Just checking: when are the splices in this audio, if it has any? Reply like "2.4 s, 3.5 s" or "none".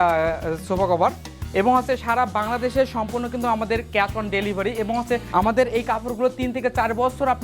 1.3 s, 5.2 s